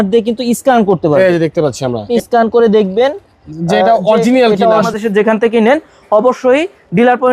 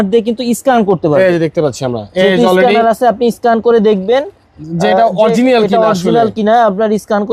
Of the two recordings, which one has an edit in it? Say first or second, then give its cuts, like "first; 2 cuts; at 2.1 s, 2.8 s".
first; 2 cuts; at 2.1 s, 4.9 s